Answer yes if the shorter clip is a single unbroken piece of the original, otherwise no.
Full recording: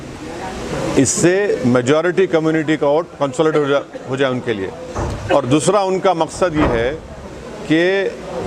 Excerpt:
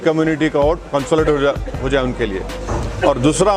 yes